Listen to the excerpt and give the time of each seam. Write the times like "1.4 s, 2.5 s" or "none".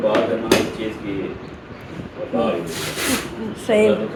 none